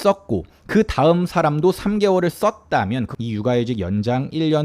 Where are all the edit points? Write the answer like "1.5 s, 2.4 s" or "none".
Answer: 3.1 s